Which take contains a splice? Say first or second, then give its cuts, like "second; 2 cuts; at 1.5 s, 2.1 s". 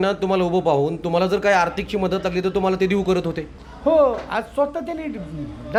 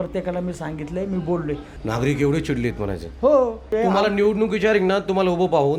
second; 2 cuts; at 1.7 s, 3.7 s